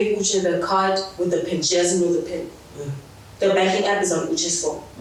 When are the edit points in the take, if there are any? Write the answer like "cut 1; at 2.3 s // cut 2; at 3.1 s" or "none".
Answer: none